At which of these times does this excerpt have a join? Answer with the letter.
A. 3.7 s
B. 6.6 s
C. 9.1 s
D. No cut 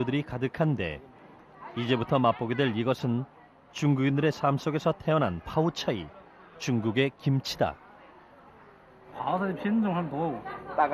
B